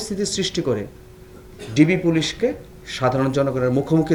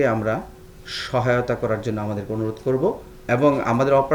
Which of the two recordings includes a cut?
second; 1 cut; at 3.1 s

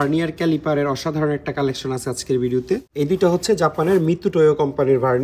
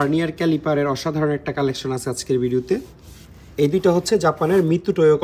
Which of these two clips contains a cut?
first; 1 cut; at 2.9 s

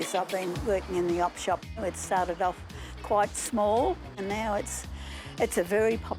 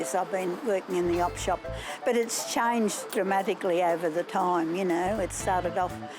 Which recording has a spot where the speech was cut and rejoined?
first; 2 cuts; at 1.8 s, 4.2 s

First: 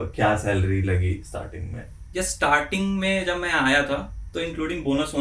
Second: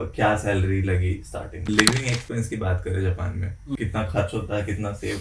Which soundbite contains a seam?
second; 2 cuts; at 1.7 s, 3.8 s

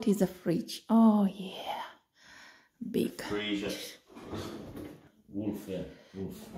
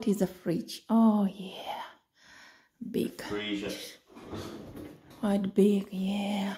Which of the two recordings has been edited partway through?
first; 1 cut; at 5.1 s

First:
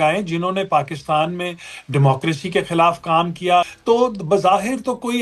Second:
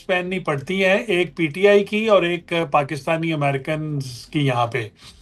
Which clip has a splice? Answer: first; 1 cut; at 3.7 s

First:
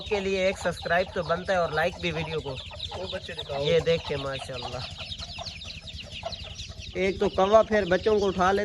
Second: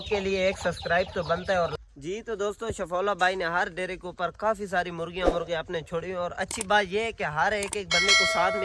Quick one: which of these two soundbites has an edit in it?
second; 1 cut; at 1.7 s

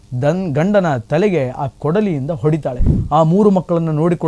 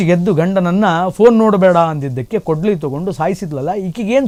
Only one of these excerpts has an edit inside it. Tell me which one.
first; 1 cut; at 2.9 s

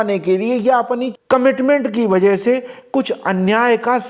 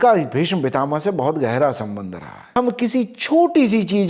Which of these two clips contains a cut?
second; 1 cut; at 2.4 s

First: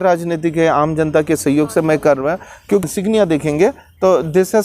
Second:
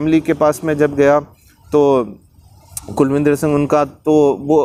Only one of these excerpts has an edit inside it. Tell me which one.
first; 1 cut; at 2.8 s

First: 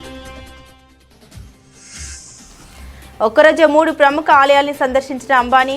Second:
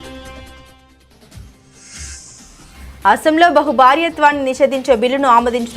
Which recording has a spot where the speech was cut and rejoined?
first; 1 cut; at 3.0 s

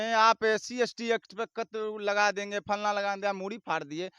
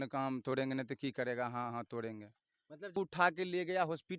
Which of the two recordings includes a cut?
second; 1 cut; at 2.9 s

